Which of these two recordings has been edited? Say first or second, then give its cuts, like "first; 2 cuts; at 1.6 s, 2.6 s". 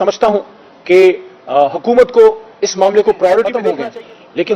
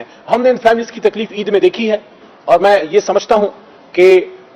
first; 1 cut; at 3.7 s